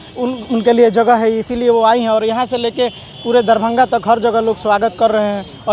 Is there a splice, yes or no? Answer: no